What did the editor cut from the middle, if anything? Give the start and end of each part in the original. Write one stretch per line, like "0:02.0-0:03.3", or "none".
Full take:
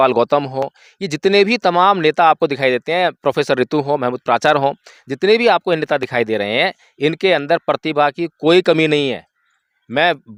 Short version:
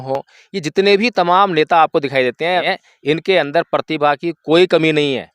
0:03.1-0:06.6